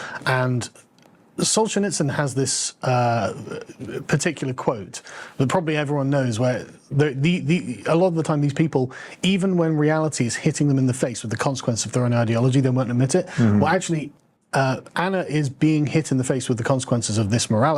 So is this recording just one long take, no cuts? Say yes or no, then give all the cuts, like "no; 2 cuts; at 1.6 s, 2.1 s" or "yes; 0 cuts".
yes; 0 cuts